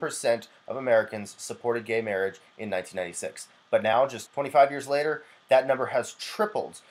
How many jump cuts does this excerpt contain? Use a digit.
1